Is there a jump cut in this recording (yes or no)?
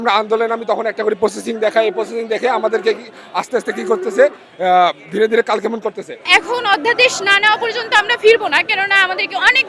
yes